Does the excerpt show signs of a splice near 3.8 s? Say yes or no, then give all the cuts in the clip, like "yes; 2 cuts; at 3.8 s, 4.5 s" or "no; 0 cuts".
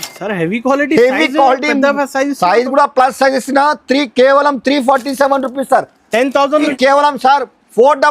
no; 1 cut; at 6.6 s